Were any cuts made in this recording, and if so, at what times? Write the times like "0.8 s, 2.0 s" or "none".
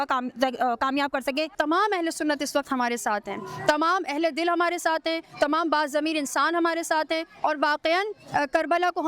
1.5 s